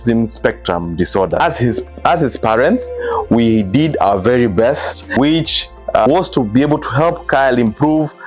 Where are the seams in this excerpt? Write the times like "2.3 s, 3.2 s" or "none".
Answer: 1.4 s, 5.2 s